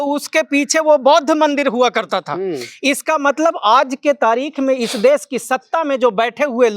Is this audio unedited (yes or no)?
yes